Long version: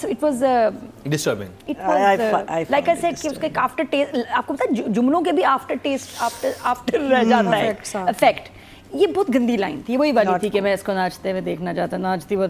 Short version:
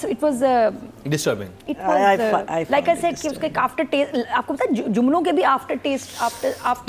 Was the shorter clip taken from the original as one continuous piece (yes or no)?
yes